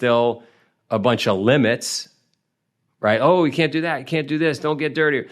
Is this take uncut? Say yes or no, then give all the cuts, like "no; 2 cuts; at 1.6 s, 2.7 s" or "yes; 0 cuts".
yes; 0 cuts